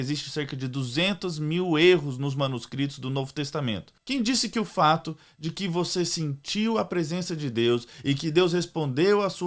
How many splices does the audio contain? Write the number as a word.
one